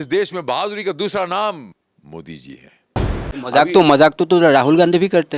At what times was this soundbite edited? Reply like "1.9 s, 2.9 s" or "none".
3.2 s